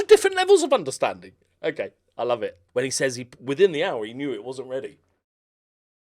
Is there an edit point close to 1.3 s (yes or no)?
no